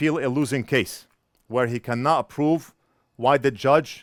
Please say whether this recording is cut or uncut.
uncut